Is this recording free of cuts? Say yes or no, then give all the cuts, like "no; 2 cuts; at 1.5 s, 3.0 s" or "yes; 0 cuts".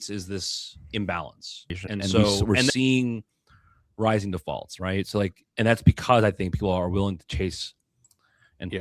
no; 1 cut; at 2.7 s